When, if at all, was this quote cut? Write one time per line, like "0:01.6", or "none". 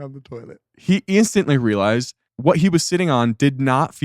0:02.2